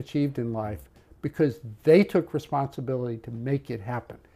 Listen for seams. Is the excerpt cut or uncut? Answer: uncut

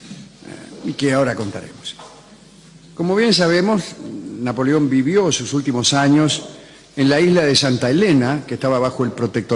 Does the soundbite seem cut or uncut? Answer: cut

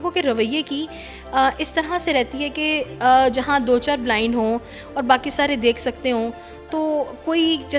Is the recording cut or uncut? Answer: uncut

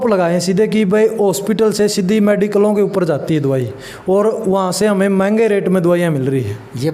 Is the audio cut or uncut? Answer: uncut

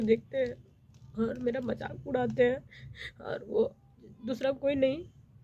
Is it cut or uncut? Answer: uncut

